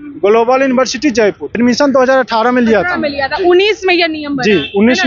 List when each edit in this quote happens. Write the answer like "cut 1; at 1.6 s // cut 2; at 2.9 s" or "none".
cut 1; at 1.5 s